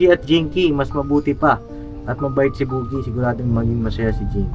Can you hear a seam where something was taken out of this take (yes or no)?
no